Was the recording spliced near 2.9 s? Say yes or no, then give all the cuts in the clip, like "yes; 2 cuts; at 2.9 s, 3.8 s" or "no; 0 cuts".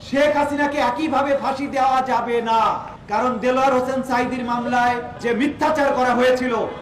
yes; 2 cuts; at 2.9 s, 5.1 s